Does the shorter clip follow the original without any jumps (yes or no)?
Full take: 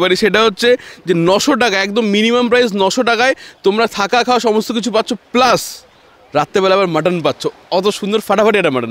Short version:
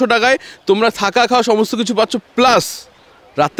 yes